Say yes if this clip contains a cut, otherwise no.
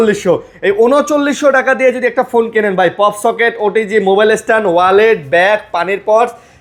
no